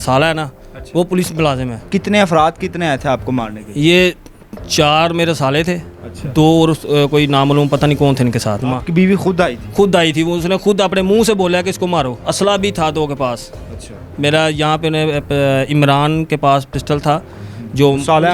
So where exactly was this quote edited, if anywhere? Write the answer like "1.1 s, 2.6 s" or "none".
1.7 s, 8.6 s, 12.2 s